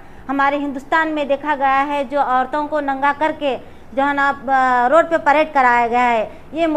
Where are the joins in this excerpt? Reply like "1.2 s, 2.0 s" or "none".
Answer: none